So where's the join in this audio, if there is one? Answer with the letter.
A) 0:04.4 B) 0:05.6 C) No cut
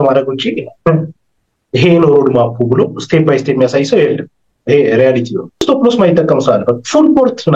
B